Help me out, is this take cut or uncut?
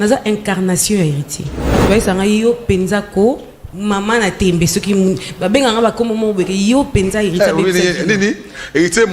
cut